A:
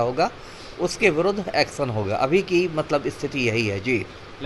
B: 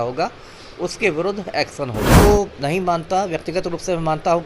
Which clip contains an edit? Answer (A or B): B